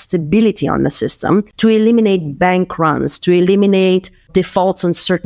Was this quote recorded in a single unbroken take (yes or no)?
no